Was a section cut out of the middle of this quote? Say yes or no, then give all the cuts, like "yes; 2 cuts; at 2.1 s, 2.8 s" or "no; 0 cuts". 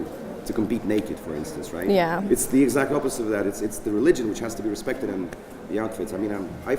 no; 0 cuts